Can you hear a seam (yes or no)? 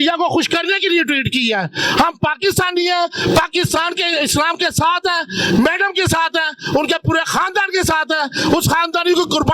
no